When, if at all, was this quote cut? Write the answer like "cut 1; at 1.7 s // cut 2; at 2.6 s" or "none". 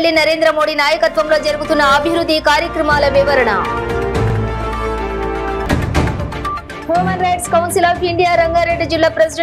none